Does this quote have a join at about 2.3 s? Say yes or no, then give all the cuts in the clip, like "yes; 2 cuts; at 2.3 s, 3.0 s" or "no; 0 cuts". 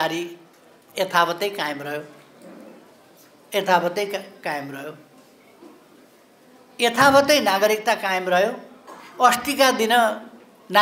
no; 0 cuts